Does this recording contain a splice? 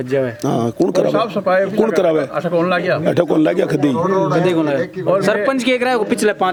no; 0 cuts

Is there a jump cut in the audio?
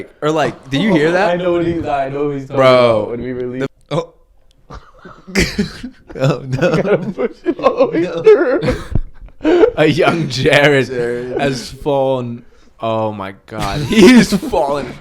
yes; 1 cut; at 3.7 s

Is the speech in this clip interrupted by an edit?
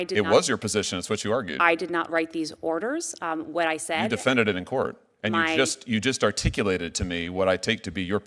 no; 0 cuts

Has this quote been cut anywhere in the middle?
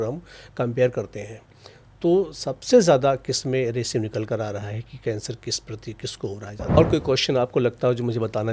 yes; 1 cut; at 6.8 s

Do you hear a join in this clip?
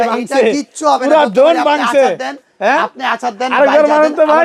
no; 0 cuts

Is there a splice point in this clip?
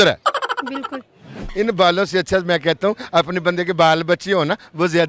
yes; 1 cut; at 1.4 s

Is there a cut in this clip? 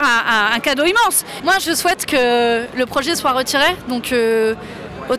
no; 0 cuts

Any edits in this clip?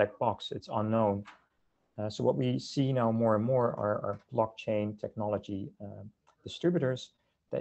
no; 0 cuts

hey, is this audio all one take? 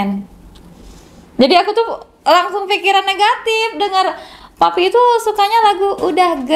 yes; 0 cuts

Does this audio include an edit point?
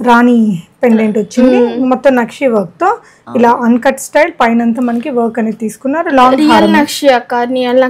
no; 0 cuts

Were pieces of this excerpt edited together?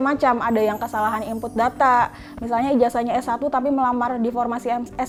no; 0 cuts

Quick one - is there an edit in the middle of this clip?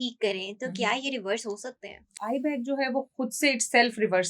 yes; 1 cut; at 2.2 s

